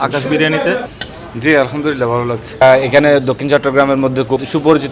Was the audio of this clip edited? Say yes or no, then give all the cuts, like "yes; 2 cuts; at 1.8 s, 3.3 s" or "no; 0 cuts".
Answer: no; 0 cuts